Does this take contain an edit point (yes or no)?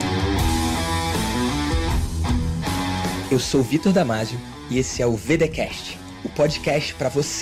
no